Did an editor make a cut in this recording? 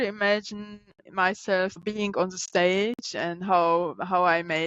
yes; 2 cuts; at 1.0 s, 1.8 s

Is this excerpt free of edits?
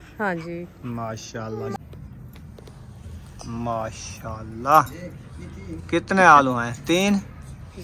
no; 1 cut; at 1.8 s

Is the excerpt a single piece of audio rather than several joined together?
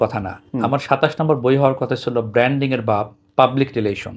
yes; 0 cuts

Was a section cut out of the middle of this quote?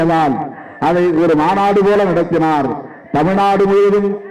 no; 0 cuts

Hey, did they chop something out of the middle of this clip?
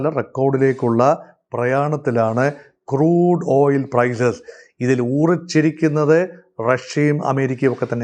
no; 0 cuts

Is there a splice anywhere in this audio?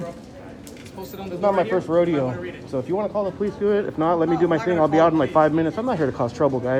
no; 0 cuts

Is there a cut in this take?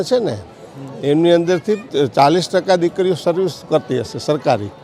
yes; 1 cut; at 1.9 s

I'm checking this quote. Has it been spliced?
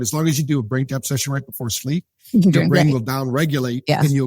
no; 0 cuts

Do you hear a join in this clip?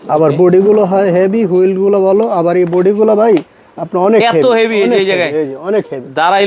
no; 0 cuts

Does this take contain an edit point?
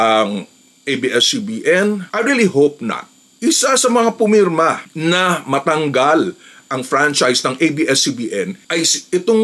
yes; 2 cuts; at 2.1 s, 3.3 s

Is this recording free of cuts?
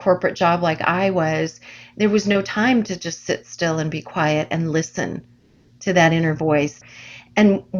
no; 1 cut; at 6.8 s

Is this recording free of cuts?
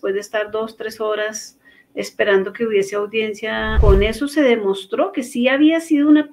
no; 1 cut; at 3.8 s

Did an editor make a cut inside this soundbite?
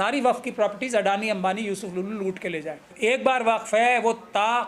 yes; 1 cut; at 2.9 s

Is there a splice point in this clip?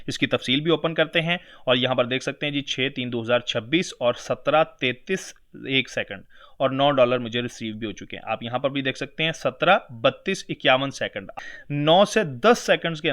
yes; 1 cut; at 11.2 s

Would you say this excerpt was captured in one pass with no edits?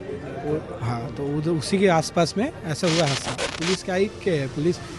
no; 1 cut; at 3.5 s

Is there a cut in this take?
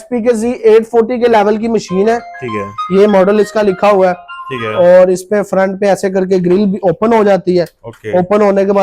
no; 0 cuts

